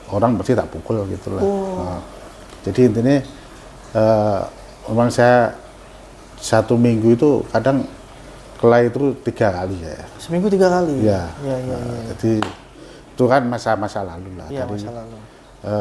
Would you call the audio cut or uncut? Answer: uncut